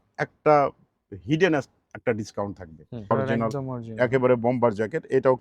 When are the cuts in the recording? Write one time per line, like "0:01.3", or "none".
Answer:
0:03.1